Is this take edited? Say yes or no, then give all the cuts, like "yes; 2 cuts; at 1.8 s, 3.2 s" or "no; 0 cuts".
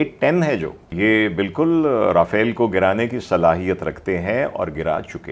yes; 1 cut; at 0.9 s